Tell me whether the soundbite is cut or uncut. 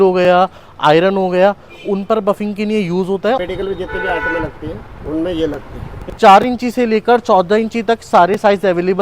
cut